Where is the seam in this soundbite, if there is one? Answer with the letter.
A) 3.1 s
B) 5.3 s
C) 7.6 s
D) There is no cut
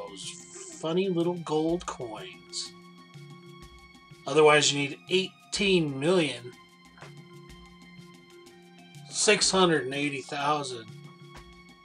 A